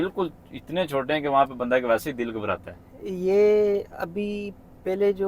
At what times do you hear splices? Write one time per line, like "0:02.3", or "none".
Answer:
none